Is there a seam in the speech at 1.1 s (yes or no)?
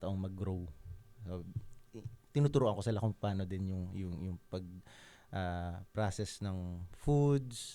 no